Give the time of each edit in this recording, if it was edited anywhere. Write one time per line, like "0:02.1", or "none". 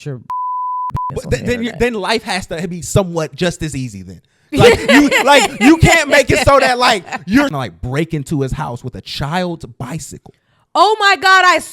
0:07.6